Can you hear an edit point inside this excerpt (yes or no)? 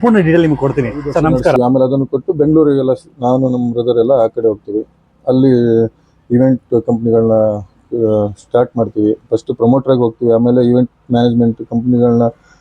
yes